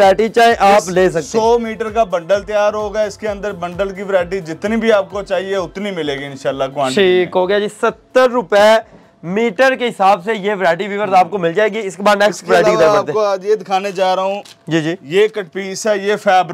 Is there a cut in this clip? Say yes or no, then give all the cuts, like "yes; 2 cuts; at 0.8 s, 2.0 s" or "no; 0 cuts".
no; 0 cuts